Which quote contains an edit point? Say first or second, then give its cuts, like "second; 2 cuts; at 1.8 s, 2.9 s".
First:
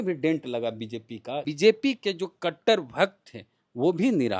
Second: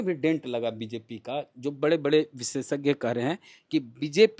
first; 1 cut; at 1.5 s